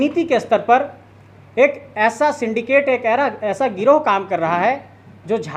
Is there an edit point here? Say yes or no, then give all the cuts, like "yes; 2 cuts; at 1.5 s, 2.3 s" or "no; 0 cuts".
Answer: no; 0 cuts